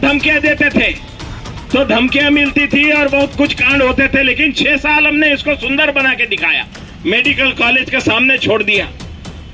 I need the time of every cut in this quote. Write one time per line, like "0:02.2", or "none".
0:06.9

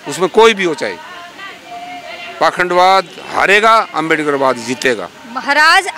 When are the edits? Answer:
none

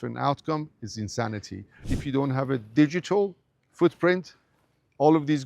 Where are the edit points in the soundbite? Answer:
0:01.8

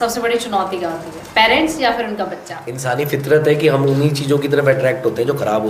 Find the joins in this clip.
0:02.7

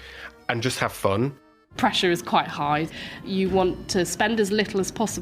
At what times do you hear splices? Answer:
0:01.7
0:03.2

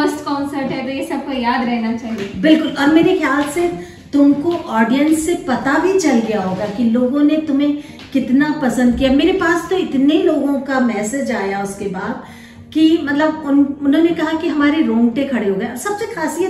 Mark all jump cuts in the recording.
none

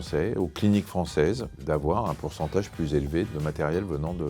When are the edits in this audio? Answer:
0:01.6
0:03.3

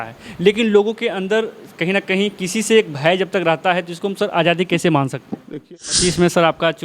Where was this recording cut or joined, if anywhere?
0:05.5

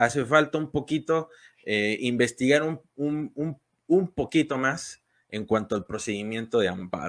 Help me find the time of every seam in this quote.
none

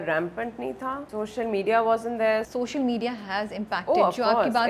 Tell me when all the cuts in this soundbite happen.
0:01.0
0:02.5

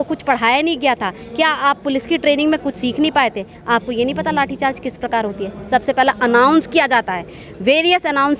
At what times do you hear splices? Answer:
none

